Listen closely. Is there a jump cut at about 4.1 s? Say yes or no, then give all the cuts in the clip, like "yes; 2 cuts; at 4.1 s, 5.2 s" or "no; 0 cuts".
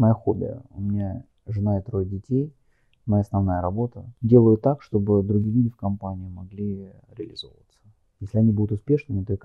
yes; 1 cut; at 4.1 s